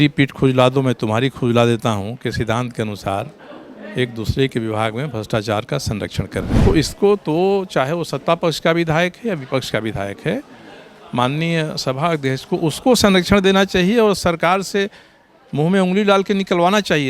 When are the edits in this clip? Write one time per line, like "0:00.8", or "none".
0:06.5